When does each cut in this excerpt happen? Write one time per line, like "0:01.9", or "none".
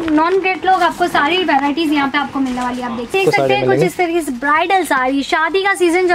0:03.1